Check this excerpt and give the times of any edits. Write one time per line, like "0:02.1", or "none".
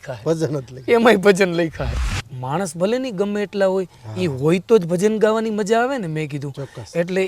0:02.0

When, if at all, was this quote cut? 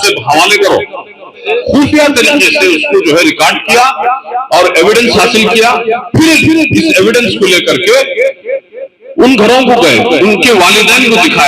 0:01.4

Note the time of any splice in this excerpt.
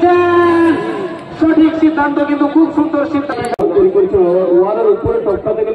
0:03.6

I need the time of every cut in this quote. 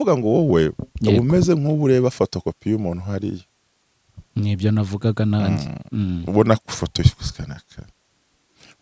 none

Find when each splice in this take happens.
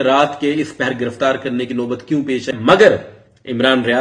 0:02.5

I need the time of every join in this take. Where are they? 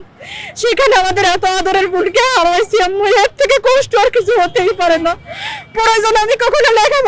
none

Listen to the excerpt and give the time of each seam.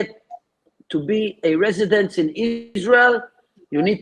0:02.7

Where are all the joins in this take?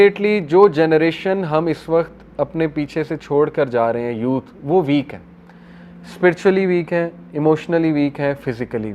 none

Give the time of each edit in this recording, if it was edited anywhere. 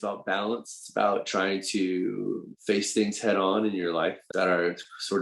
0:02.5
0:04.2

